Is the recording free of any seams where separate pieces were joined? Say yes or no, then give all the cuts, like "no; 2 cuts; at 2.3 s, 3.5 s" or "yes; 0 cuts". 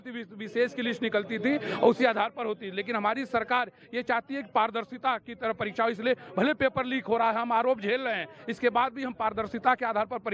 yes; 0 cuts